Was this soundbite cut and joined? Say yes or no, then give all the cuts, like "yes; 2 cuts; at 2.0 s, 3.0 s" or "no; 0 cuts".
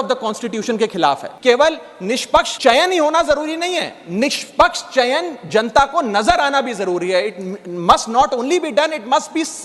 yes; 2 cuts; at 1.3 s, 2.5 s